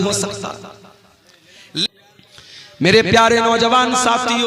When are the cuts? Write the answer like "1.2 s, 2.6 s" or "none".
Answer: 1.9 s